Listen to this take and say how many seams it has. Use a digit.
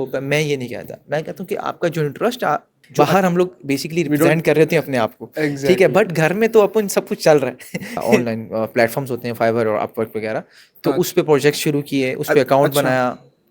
2